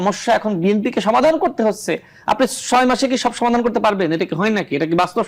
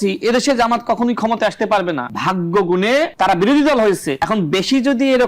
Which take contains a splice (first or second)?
second